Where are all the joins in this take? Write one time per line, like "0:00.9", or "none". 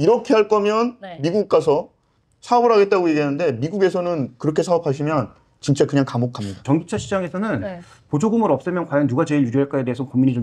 0:06.6